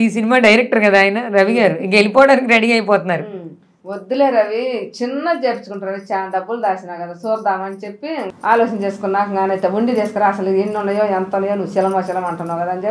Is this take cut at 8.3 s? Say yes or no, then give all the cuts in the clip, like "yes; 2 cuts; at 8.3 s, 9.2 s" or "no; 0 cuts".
yes; 1 cut; at 8.3 s